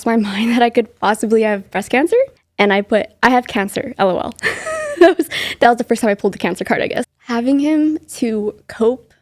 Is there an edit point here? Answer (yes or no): yes